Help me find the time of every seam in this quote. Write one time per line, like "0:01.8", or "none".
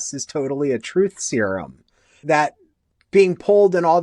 0:02.2

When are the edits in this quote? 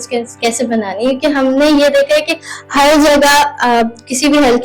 none

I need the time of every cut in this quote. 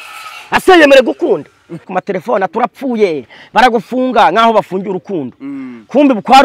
0:01.9

